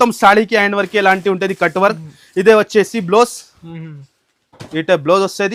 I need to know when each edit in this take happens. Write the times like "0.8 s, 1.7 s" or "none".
none